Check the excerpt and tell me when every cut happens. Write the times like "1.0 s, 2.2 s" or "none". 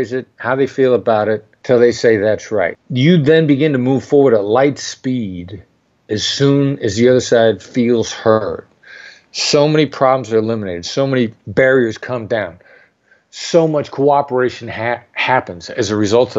1.5 s, 2.8 s, 11.4 s